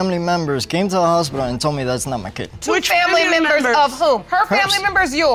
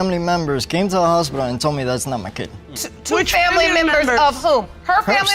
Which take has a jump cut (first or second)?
first